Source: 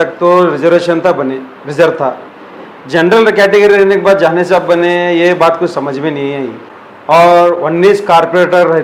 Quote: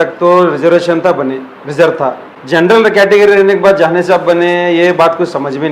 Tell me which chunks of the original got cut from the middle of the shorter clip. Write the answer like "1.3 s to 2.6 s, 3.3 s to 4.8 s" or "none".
2.3 s to 2.7 s